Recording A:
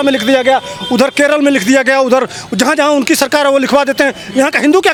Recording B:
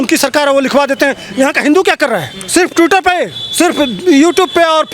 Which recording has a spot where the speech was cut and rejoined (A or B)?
B